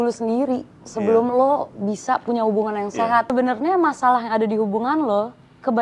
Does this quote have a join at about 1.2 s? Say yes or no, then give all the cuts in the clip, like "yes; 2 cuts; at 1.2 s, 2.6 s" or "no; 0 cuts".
no; 1 cut; at 3.3 s